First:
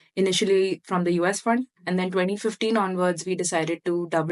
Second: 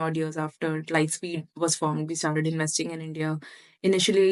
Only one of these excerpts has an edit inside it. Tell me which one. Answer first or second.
first